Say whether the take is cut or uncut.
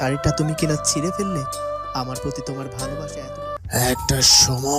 cut